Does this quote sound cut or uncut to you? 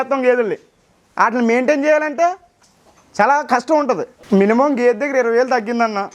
cut